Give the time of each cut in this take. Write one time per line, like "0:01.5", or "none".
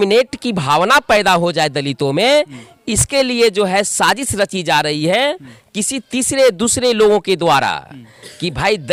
none